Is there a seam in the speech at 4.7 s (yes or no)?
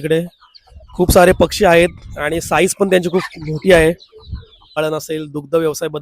yes